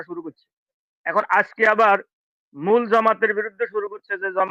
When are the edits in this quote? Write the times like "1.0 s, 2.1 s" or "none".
none